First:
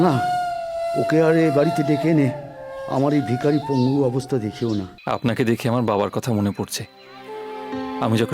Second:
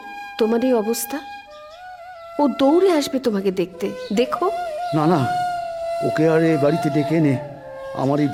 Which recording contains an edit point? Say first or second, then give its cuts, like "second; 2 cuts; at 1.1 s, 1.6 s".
first; 1 cut; at 4.9 s